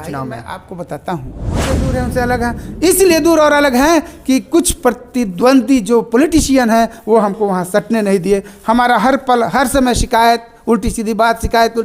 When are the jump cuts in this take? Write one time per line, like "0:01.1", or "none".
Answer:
0:01.6